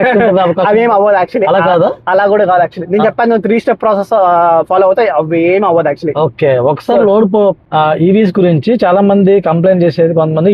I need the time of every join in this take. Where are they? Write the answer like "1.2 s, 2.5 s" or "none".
7.6 s

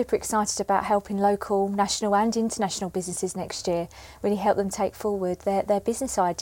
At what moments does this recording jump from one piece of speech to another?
none

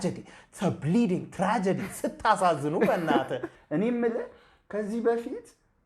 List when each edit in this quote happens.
3.5 s

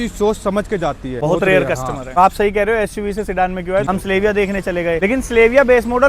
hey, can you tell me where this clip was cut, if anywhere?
1.1 s, 2.2 s, 3.8 s, 5.0 s

